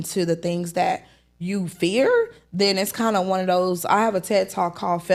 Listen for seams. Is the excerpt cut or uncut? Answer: uncut